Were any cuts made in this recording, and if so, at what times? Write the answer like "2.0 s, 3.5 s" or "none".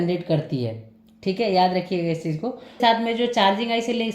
2.8 s